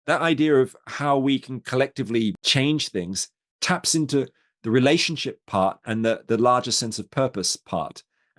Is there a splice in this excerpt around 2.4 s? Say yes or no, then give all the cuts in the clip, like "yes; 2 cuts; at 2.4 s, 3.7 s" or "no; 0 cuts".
yes; 1 cut; at 2.4 s